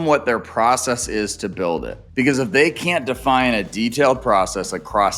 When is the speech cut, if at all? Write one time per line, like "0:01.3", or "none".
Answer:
0:02.0